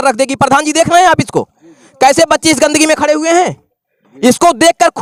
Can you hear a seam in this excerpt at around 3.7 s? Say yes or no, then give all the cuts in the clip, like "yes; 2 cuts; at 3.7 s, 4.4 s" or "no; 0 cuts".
no; 0 cuts